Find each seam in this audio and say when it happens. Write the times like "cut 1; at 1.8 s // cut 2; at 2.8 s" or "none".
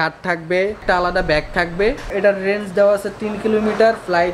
cut 1; at 0.8 s // cut 2; at 2.1 s

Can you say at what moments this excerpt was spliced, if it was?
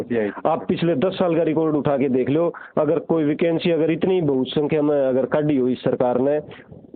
none

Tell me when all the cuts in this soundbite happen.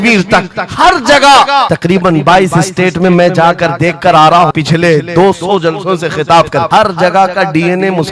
cut 1; at 1.7 s // cut 2; at 4.5 s // cut 3; at 6.7 s

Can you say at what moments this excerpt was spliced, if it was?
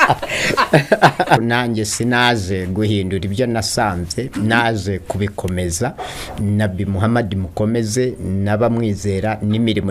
cut 1; at 1.4 s

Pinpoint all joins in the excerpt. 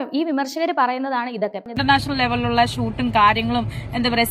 cut 1; at 1.8 s

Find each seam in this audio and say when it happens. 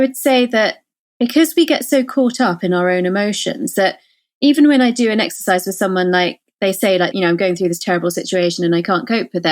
cut 1; at 7.1 s

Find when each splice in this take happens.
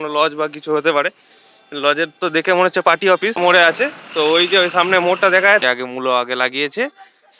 cut 1; at 3.4 s // cut 2; at 5.6 s

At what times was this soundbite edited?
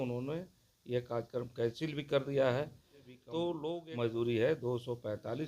cut 1; at 3.8 s

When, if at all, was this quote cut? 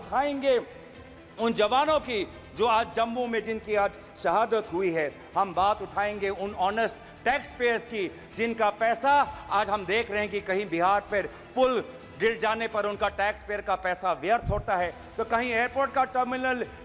none

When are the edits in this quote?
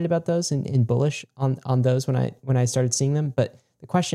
none

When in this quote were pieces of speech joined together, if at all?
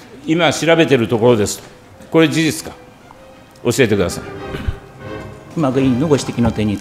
cut 1; at 2.0 s // cut 2; at 5.5 s

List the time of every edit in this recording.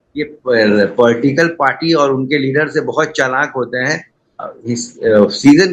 none

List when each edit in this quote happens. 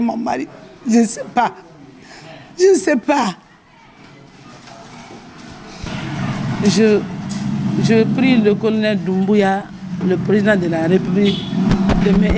cut 1; at 5.9 s

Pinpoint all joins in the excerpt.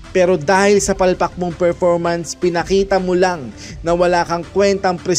none

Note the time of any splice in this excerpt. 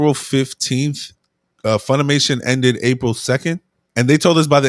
cut 1; at 3.8 s

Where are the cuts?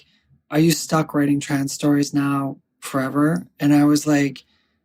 none

